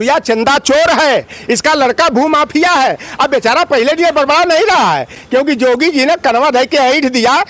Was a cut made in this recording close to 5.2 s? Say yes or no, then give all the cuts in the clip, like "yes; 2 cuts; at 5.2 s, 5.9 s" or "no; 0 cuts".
no; 0 cuts